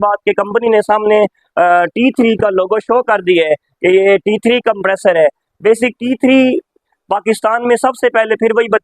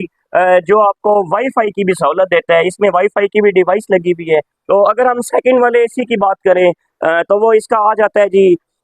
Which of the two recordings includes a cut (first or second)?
second